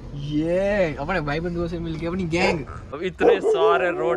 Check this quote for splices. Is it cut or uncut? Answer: cut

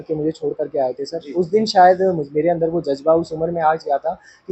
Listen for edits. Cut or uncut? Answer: uncut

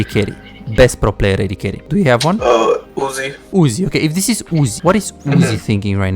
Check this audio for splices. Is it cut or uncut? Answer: cut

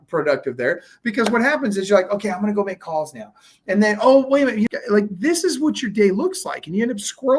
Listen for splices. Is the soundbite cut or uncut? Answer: cut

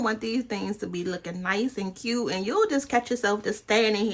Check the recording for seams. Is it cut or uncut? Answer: uncut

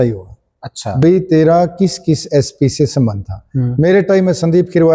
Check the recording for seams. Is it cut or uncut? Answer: uncut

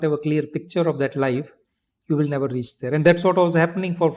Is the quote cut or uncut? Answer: uncut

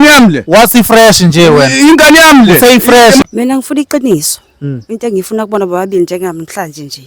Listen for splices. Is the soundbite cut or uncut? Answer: cut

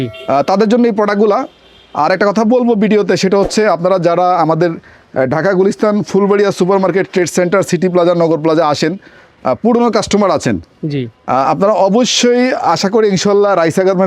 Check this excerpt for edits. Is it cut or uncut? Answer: uncut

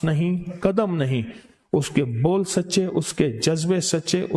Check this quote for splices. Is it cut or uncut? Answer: uncut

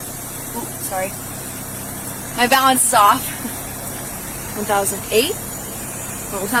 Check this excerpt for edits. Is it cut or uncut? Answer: uncut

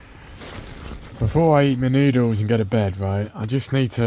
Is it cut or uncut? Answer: uncut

